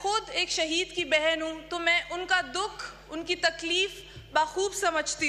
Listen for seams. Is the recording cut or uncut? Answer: uncut